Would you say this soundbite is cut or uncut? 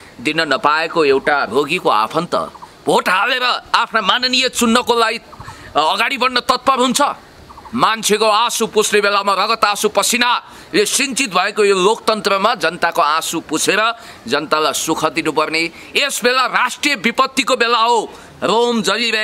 cut